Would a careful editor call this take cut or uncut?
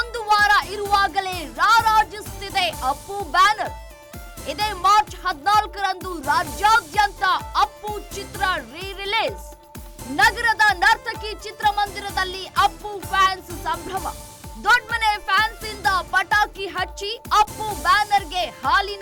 uncut